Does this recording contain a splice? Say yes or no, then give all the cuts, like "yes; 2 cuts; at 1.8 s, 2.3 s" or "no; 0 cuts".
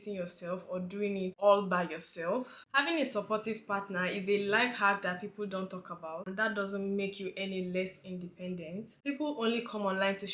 yes; 3 cuts; at 2.7 s, 6.3 s, 8.9 s